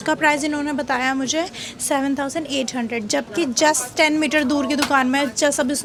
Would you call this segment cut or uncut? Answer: uncut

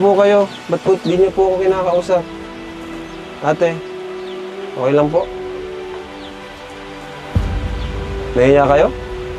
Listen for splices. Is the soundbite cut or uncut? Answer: uncut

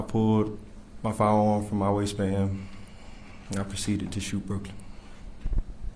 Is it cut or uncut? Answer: uncut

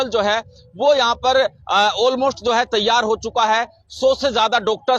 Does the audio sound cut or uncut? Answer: uncut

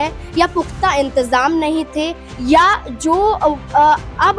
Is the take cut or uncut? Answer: uncut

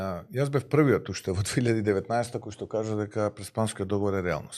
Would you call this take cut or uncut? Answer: uncut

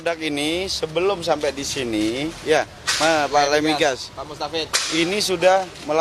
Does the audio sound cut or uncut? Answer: uncut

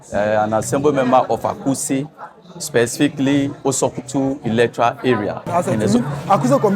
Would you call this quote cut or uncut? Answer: cut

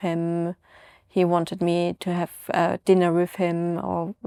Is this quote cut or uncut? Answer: uncut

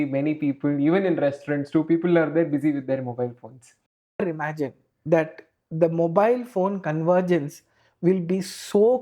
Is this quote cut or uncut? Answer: cut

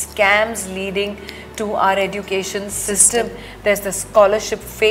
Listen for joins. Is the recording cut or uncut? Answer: uncut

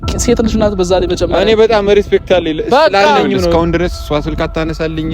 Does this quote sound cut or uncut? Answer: cut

